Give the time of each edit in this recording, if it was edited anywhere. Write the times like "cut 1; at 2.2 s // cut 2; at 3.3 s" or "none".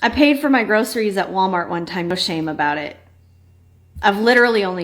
cut 1; at 2.1 s